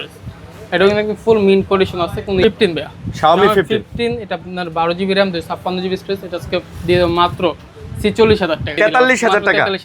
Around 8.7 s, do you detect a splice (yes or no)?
yes